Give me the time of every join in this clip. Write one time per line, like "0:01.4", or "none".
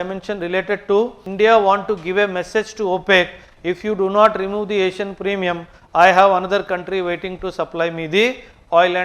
0:01.2